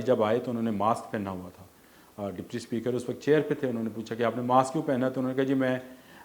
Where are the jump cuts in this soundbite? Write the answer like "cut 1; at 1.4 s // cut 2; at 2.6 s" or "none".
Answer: none